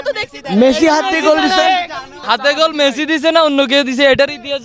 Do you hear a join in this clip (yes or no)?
yes